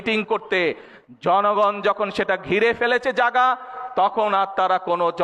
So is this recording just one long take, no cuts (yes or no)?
yes